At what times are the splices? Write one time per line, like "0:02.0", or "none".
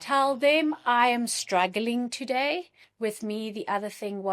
0:02.8